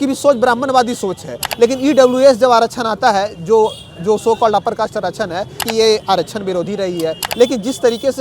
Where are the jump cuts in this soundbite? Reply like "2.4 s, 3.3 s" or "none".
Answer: 1.4 s, 5.7 s, 7.2 s

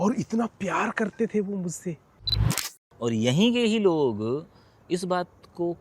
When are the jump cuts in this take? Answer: 2.6 s

